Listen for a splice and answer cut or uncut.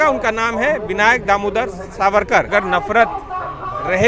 cut